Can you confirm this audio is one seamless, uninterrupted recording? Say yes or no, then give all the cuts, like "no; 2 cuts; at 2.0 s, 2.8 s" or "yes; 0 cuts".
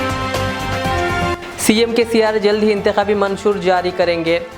no; 1 cut; at 1.3 s